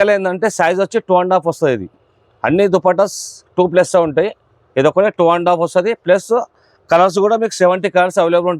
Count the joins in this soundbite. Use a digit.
0